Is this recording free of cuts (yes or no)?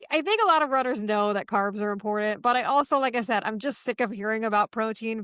yes